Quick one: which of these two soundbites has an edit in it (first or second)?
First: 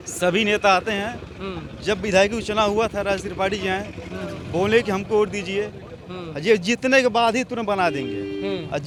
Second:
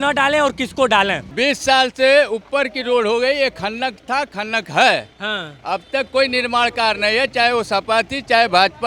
second